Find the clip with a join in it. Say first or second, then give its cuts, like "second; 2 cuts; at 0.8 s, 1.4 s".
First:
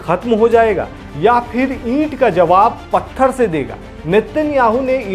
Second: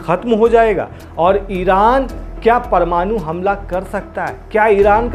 second; 1 cut; at 1.0 s